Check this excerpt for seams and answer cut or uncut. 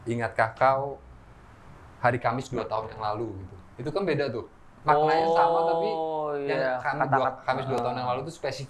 uncut